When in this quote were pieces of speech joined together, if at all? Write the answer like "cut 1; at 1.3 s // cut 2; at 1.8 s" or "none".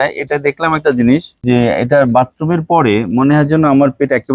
cut 1; at 1.3 s